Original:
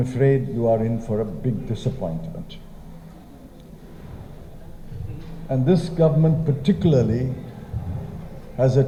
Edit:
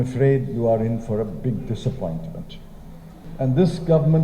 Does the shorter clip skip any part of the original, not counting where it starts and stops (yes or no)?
yes